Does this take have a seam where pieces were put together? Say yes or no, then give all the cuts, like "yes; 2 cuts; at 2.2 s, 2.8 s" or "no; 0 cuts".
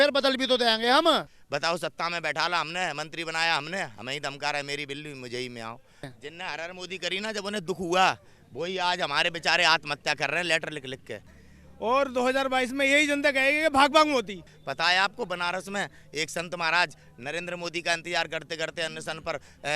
yes; 4 cuts; at 1.4 s, 6.1 s, 11.4 s, 14.5 s